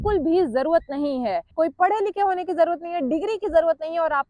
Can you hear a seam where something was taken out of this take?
yes; 1 cut; at 1.5 s

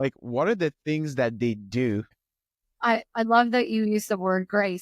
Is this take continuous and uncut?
no; 1 cut; at 2.1 s

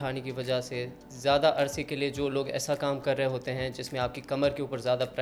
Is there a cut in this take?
no; 0 cuts

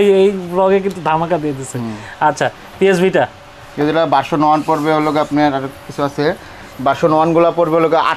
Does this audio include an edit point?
no; 0 cuts

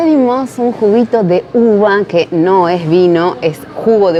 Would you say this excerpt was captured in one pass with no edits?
yes; 0 cuts

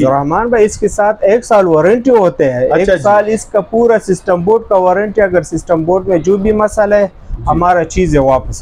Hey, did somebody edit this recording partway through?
no; 0 cuts

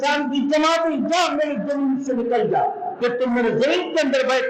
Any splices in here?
no; 0 cuts

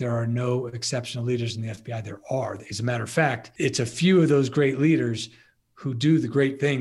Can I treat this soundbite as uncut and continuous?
yes; 0 cuts

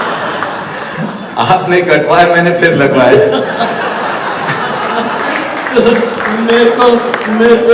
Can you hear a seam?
no; 0 cuts

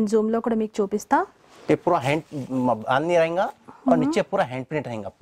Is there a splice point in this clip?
no; 0 cuts

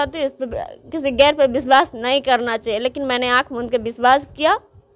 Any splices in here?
no; 0 cuts

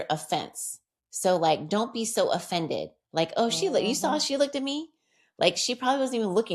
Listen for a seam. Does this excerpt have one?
no; 0 cuts

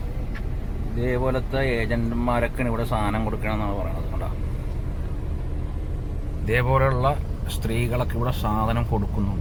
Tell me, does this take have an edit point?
no; 0 cuts

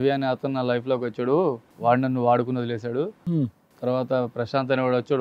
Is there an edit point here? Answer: no; 0 cuts

